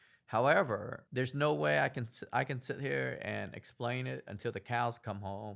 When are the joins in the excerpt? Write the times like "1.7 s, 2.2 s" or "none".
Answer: 0.9 s